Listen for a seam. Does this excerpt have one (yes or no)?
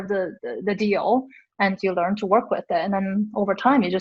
no